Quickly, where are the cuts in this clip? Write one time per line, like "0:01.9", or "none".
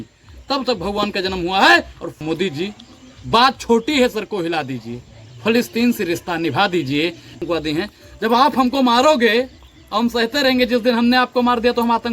0:02.2
0:07.4